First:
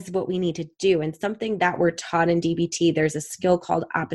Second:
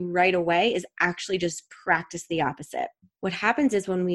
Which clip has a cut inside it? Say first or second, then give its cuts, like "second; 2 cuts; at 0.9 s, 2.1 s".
second; 1 cut; at 3.0 s